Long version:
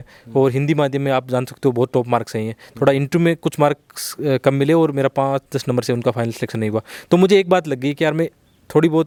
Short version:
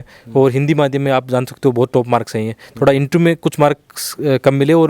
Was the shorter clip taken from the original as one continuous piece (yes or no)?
yes